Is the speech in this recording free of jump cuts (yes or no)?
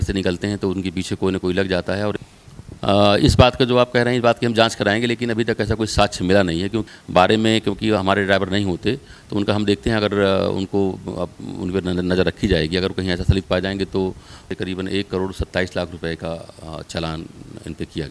no